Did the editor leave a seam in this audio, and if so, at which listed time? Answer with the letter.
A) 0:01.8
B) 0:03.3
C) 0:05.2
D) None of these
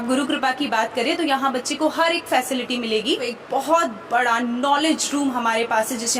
B